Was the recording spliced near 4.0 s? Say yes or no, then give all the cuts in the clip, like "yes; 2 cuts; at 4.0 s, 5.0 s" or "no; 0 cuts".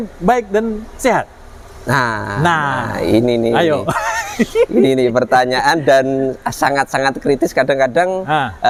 no; 0 cuts